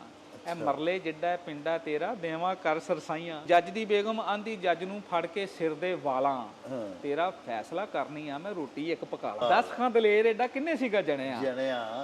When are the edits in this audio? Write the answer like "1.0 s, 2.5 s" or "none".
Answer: 3.4 s, 9.4 s